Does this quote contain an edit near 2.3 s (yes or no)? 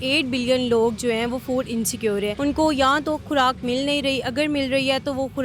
yes